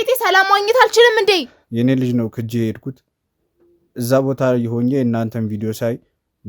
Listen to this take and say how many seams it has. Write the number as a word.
one